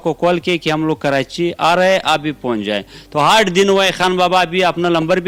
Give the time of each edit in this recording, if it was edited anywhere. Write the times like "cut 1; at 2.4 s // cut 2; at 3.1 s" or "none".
none